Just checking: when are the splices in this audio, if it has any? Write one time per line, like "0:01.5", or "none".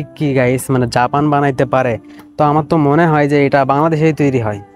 none